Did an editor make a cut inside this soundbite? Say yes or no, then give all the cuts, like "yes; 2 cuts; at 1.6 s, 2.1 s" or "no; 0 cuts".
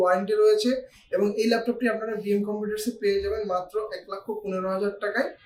no; 0 cuts